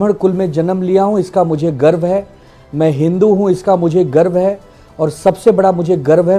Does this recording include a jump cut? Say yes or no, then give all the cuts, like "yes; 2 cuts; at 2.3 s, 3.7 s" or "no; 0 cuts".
no; 0 cuts